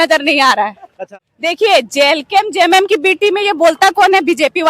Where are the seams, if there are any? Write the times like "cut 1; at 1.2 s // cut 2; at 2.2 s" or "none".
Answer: cut 1; at 1.0 s